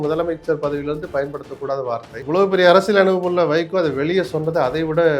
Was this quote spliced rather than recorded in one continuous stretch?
yes; 1 cut; at 2.1 s

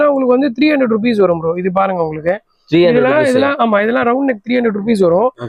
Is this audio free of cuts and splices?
yes; 0 cuts

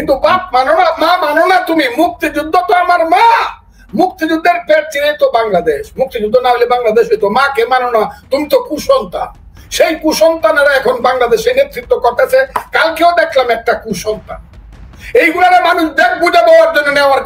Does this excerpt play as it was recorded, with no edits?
yes; 0 cuts

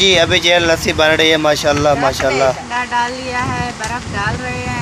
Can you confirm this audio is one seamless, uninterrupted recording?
no; 1 cut; at 2.6 s

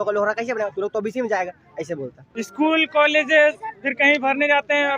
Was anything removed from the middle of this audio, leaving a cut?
yes; 1 cut; at 2.5 s

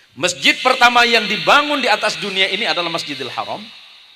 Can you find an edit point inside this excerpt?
no; 0 cuts

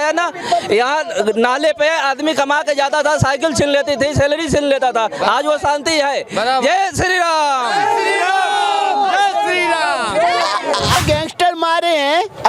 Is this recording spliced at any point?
yes; 1 cut; at 11.0 s

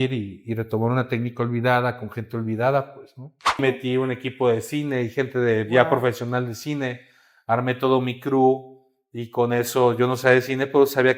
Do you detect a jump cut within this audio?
yes; 1 cut; at 3.6 s

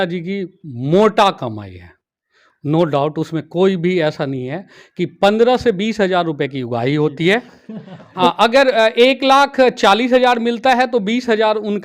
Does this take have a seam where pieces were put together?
yes; 1 cut; at 8.0 s

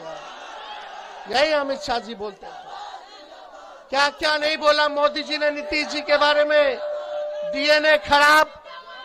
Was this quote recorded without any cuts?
yes; 0 cuts

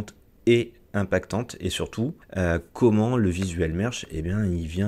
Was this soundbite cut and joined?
yes; 1 cut; at 2.2 s

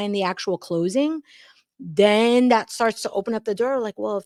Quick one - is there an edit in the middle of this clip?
no; 0 cuts

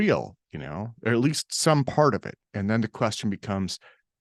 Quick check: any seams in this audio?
no; 0 cuts

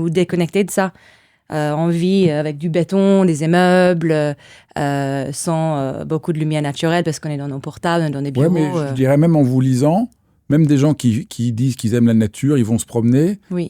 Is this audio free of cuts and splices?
yes; 0 cuts

